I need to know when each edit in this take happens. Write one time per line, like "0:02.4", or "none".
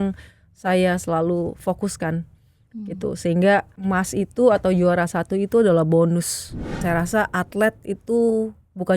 0:03.7
0:06.8